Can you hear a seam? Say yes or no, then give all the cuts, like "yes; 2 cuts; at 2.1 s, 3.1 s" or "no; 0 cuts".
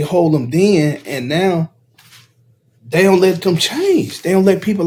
no; 0 cuts